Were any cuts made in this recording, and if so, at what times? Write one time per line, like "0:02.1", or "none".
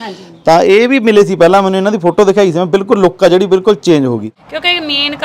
0:04.3